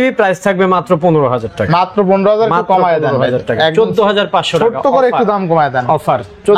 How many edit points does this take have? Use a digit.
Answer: 0